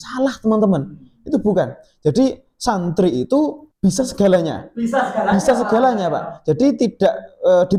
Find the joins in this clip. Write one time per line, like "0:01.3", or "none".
none